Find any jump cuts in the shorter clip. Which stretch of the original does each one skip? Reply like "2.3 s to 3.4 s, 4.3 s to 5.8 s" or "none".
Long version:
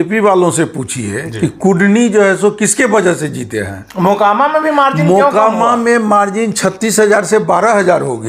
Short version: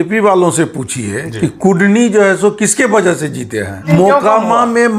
3.8 s to 5.0 s